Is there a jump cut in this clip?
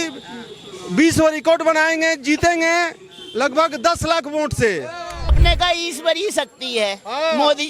yes; 1 cut; at 5.4 s

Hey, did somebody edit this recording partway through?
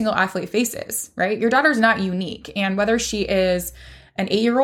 no; 0 cuts

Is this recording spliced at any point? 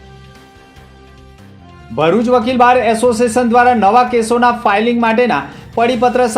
no; 0 cuts

